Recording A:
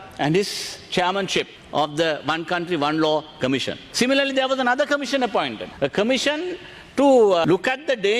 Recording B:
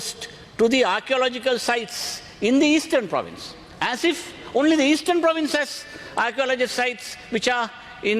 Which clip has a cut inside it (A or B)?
A